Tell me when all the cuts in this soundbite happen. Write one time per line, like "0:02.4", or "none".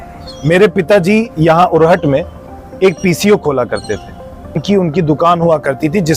0:04.6